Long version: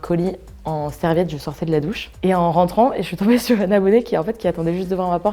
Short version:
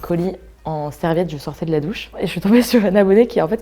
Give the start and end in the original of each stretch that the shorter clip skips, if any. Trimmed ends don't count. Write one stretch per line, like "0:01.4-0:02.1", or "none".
0:02.2-0:03.0